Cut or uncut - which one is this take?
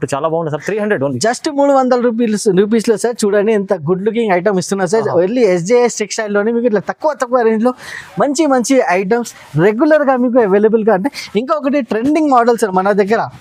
uncut